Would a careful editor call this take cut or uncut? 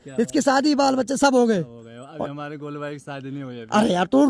uncut